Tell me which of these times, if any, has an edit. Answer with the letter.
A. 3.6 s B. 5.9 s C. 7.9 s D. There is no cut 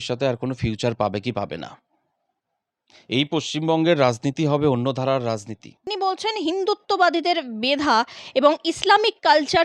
B